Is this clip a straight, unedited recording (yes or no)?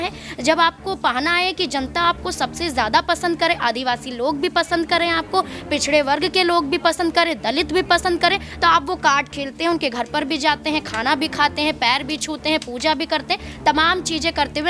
yes